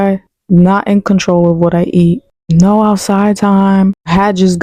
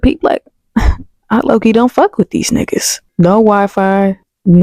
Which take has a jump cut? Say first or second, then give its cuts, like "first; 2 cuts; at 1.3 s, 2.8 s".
second; 1 cut; at 3.0 s